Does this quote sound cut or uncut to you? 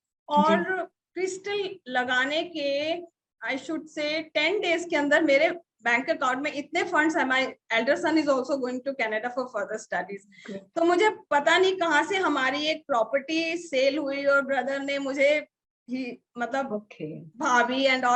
uncut